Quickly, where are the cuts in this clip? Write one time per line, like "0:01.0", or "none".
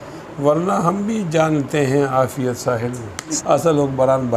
0:03.4